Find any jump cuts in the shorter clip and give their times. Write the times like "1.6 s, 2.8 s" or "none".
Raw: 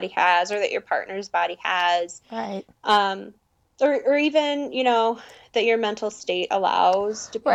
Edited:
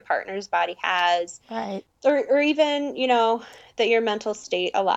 1.8 s